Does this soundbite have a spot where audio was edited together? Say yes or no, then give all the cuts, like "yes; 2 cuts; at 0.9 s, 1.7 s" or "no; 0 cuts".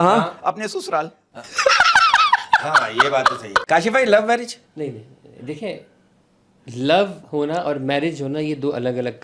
yes; 1 cut; at 3.6 s